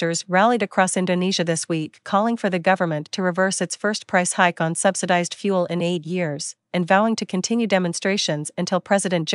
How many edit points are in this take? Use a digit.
1